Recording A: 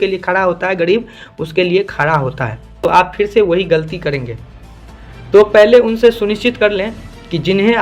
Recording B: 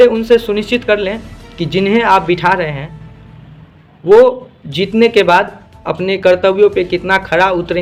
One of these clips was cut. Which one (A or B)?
A